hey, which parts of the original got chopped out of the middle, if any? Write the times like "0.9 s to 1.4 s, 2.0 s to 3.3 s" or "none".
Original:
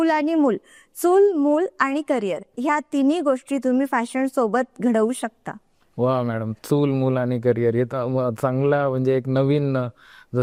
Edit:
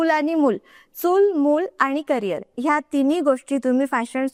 none